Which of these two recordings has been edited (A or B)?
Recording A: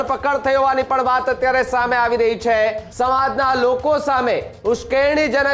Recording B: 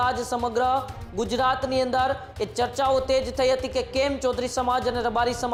A